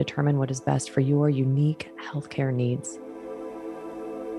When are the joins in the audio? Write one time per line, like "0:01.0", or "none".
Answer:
0:02.9